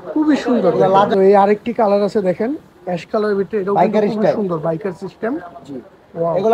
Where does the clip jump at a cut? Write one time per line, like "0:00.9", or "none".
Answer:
0:01.1